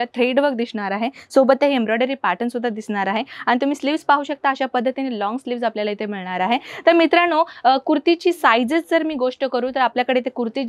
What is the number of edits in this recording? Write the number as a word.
zero